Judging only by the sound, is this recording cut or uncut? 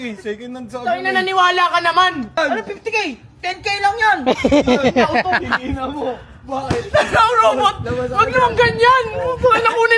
cut